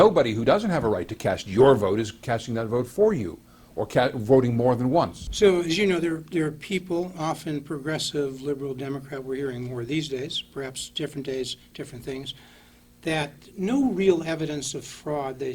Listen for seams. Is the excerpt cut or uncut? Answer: cut